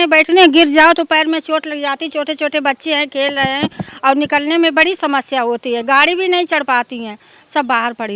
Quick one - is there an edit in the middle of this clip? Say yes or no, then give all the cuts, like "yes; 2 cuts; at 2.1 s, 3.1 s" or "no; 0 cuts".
no; 0 cuts